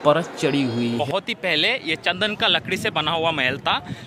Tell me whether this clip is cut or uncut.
cut